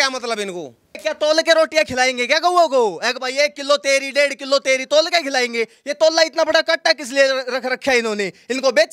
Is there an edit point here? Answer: yes; 1 cut; at 1.0 s

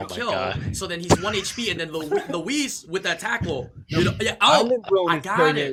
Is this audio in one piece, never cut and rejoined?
yes; 0 cuts

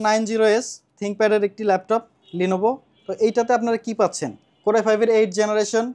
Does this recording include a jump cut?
no; 0 cuts

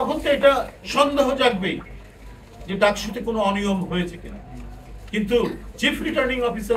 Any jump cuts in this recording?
no; 0 cuts

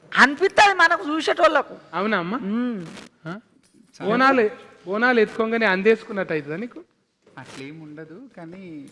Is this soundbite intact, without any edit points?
yes; 0 cuts

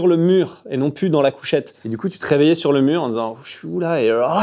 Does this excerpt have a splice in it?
yes; 1 cut; at 1.8 s

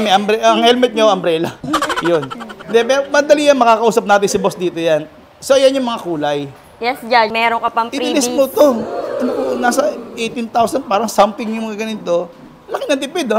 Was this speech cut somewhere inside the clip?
yes; 1 cut; at 7.3 s

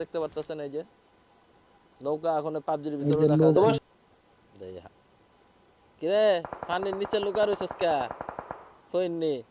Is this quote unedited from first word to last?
no; 1 cut; at 3.8 s

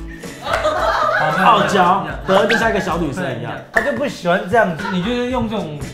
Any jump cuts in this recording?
yes; 1 cut; at 4.8 s

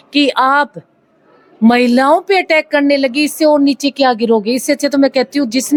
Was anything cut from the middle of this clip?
no; 0 cuts

